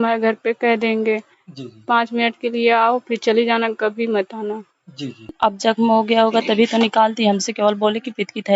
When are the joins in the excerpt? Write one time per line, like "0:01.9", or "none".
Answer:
0:05.2